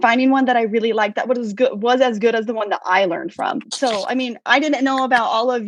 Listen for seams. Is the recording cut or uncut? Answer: uncut